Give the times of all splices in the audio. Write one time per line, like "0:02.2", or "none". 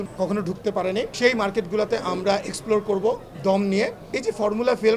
0:04.1